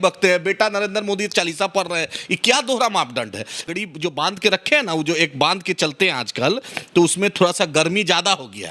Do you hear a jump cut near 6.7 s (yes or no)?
no